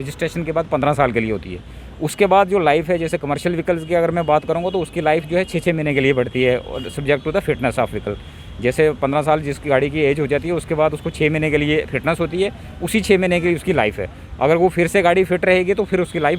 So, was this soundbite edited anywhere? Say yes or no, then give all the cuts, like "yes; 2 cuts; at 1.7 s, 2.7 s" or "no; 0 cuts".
no; 0 cuts